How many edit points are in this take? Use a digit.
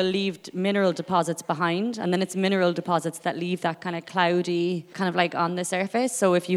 1